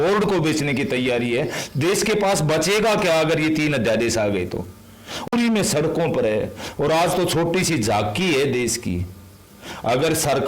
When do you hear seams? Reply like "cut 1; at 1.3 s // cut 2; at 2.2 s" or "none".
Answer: cut 1; at 5.3 s